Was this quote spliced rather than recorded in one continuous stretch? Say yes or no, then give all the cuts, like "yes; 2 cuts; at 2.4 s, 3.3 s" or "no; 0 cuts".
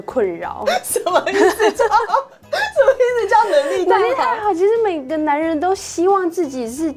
no; 0 cuts